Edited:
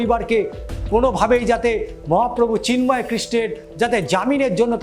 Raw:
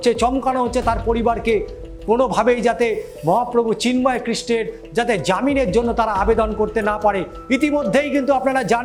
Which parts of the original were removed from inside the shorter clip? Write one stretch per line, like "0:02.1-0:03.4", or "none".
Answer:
none